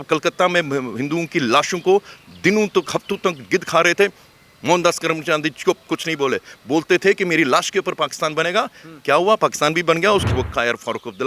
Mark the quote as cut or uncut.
cut